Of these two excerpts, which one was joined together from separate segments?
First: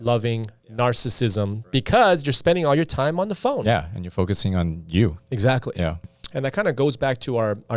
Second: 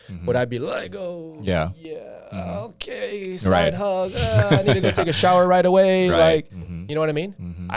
first; 1 cut; at 6.1 s

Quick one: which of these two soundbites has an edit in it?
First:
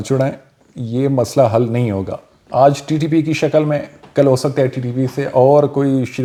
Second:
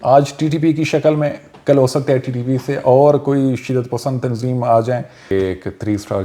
second; 1 cut; at 5.3 s

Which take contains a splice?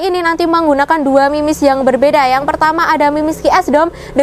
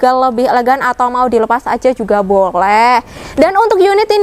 second; 1 cut; at 3.2 s

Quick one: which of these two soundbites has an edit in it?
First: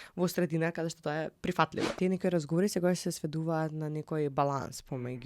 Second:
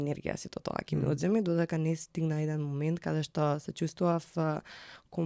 first; 1 cut; at 1.9 s

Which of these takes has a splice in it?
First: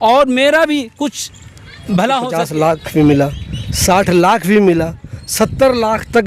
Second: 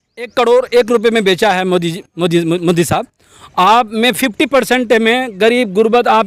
first; 1 cut; at 2.4 s

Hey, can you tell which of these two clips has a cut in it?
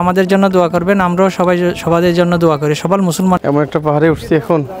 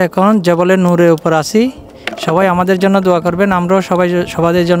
first; 1 cut; at 3.4 s

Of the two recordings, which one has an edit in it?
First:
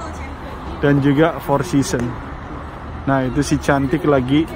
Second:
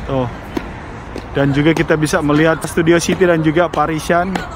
second; 1 cut; at 2.7 s

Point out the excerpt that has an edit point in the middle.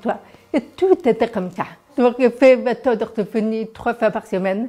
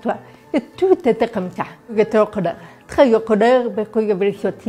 second; 2 cuts; at 1.9 s, 2.8 s

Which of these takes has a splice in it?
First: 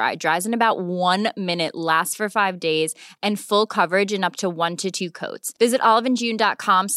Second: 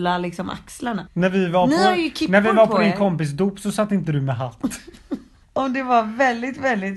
second; 2 cuts; at 1.1 s, 5.3 s

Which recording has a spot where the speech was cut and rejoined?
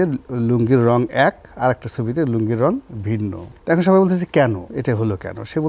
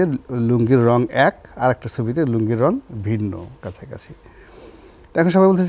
first; 2 cuts; at 3.5 s, 4.7 s

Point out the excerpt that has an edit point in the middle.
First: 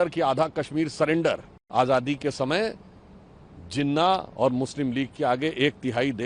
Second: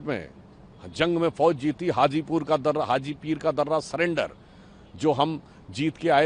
first; 1 cut; at 1.6 s

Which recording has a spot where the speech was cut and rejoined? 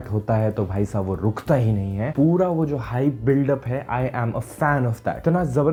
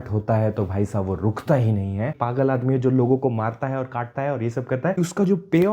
second; 2 cuts; at 2.1 s, 5.0 s

